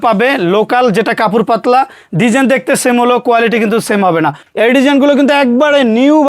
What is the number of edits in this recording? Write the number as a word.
one